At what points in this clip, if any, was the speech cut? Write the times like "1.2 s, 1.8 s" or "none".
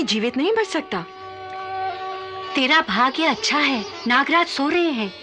none